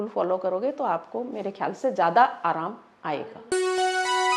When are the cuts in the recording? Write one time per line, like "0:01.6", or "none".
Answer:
0:03.4